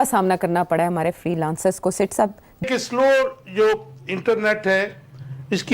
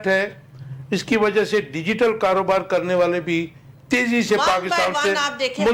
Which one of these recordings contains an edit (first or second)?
first